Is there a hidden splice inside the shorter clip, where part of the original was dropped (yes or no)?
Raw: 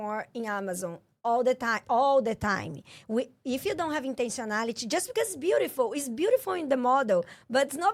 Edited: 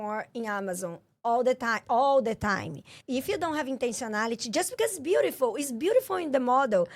yes